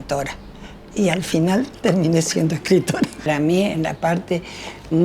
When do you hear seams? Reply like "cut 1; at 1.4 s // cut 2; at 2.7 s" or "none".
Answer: cut 1; at 3.3 s

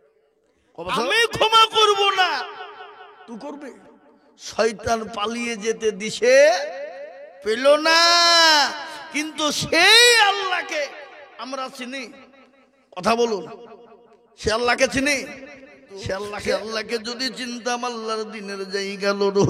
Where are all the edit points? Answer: cut 1; at 1.0 s // cut 2; at 16.6 s

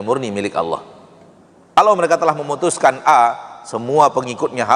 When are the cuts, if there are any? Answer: cut 1; at 1.8 s

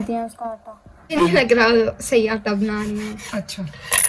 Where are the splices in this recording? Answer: cut 1; at 1.1 s

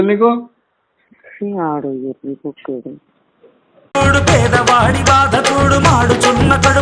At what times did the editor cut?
none

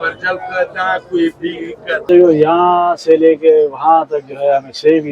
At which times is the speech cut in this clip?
cut 1; at 2.0 s

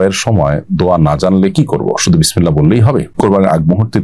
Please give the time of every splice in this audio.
cut 1; at 3.1 s

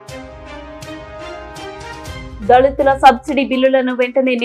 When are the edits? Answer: cut 1; at 0.9 s // cut 2; at 2.3 s

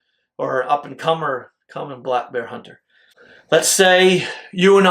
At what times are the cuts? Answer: cut 1; at 3.2 s

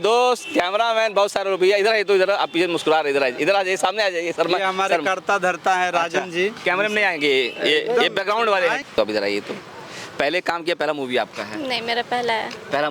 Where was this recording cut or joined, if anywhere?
cut 1; at 8.8 s

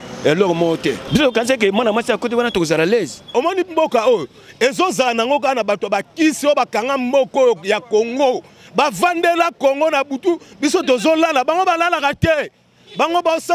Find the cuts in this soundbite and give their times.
cut 1; at 1.0 s // cut 2; at 3.3 s

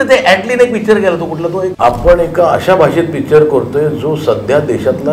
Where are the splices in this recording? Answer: cut 1; at 1.7 s

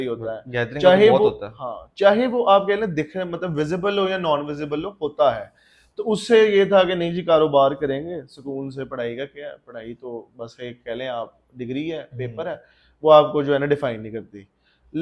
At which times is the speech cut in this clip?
none

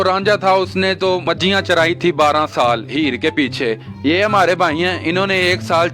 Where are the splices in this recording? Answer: cut 1; at 1.2 s

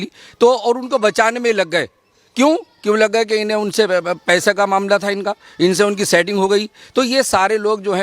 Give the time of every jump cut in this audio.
none

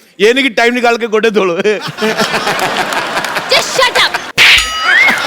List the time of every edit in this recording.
cut 1; at 4.3 s

